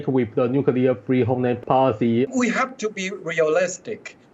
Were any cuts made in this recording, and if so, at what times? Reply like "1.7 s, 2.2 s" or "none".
1.6 s, 2.3 s